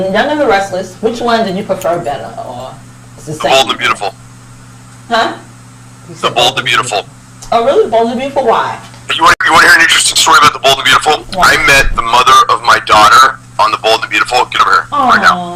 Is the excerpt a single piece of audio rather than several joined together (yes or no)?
yes